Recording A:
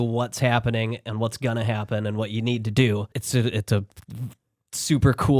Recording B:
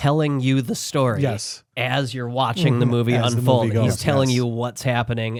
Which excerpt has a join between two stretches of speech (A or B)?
A